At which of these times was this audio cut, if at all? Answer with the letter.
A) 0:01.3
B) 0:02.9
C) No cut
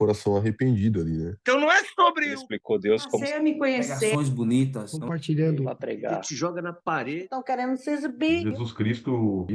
A